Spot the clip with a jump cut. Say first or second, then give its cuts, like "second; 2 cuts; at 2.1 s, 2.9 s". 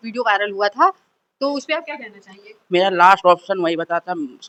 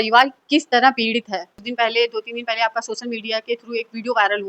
second; 1 cut; at 1.6 s